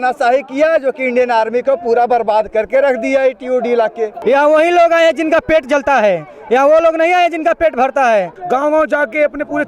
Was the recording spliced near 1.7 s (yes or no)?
no